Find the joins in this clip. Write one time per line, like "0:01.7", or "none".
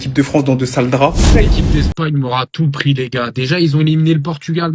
0:01.5